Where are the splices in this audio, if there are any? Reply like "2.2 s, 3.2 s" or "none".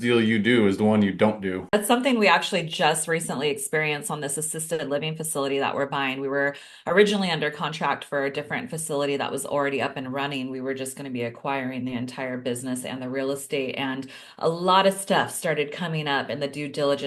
1.7 s